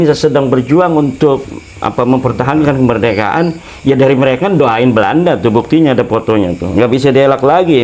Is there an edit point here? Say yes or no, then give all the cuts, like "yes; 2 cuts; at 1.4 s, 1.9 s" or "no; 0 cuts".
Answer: no; 0 cuts